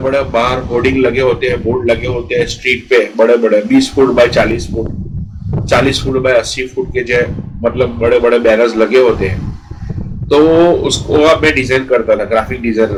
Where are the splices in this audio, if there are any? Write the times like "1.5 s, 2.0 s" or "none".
none